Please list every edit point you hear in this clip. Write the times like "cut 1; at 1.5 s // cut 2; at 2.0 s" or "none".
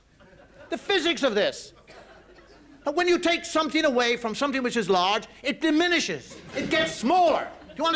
cut 1; at 1.3 s